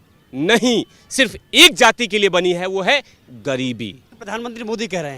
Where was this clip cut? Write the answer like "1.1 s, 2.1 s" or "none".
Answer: 4.1 s